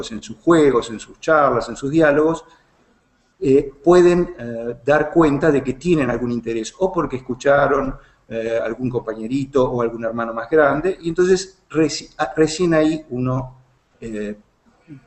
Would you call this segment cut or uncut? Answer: uncut